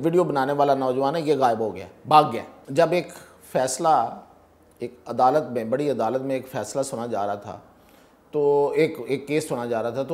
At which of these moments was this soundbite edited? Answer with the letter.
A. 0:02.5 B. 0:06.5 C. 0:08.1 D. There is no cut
A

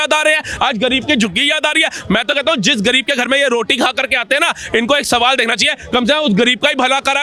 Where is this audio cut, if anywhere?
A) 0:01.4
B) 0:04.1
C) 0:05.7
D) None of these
D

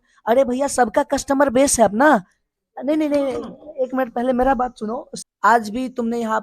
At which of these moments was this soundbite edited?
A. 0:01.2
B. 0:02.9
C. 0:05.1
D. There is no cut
C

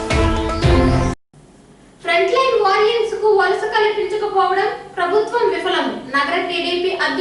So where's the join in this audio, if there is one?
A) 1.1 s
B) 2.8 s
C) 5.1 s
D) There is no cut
A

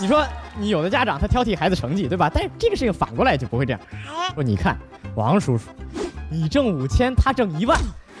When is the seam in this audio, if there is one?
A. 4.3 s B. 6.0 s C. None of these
A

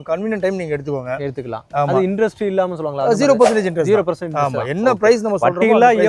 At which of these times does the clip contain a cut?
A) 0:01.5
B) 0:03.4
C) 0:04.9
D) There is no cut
D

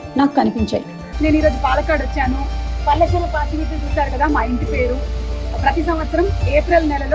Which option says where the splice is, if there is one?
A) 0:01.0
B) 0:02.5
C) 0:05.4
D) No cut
A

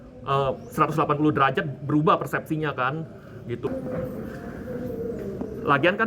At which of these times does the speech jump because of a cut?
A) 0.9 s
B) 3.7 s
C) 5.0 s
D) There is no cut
B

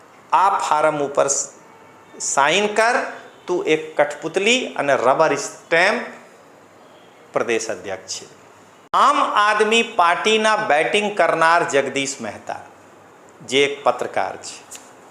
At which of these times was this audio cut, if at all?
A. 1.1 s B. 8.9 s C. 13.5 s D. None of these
B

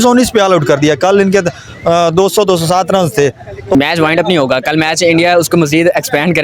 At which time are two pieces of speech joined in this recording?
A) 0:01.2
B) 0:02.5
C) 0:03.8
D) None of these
C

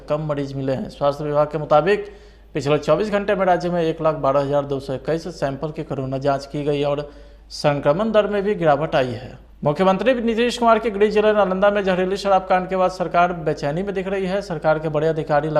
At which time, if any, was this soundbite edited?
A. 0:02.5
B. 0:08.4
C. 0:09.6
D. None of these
C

